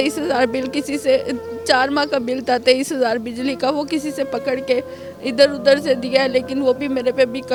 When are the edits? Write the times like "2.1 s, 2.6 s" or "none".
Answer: none